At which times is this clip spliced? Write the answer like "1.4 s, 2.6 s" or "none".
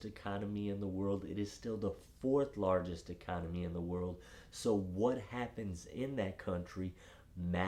none